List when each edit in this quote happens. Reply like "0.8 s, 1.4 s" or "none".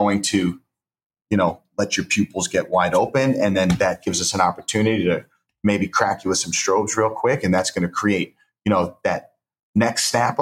none